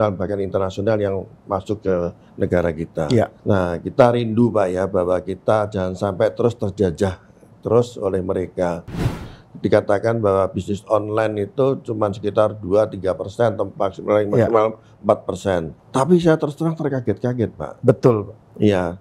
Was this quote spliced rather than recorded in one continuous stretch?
yes; 3 cuts; at 3.4 s, 9.1 s, 15.8 s

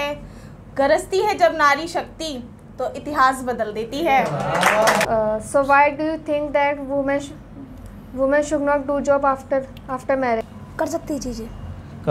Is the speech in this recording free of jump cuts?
no; 2 cuts; at 5.0 s, 10.4 s

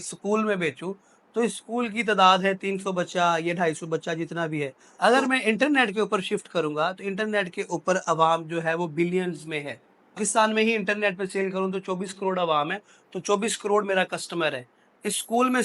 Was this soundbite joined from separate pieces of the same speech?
yes; 2 cuts; at 4.8 s, 10.2 s

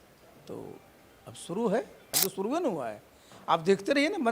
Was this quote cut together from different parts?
yes; 1 cut; at 2.1 s

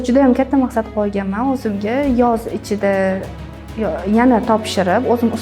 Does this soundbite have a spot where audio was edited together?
no; 0 cuts

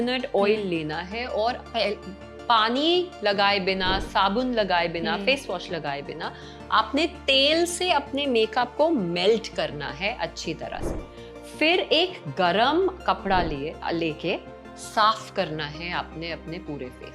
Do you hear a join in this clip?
no; 0 cuts

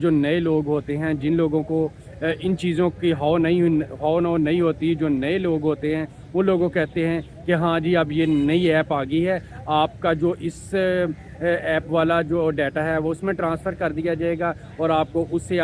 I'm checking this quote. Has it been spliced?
no; 0 cuts

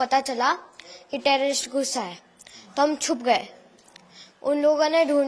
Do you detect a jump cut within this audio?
no; 0 cuts

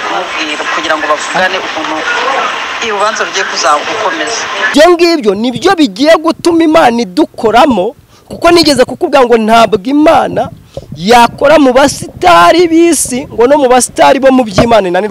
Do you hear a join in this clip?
yes; 1 cut; at 4.7 s

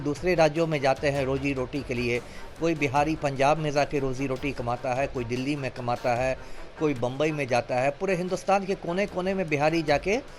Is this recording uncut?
yes; 0 cuts

